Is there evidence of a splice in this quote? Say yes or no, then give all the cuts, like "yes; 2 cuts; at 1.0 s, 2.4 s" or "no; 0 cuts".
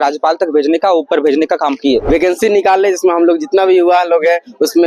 yes; 1 cut; at 2.0 s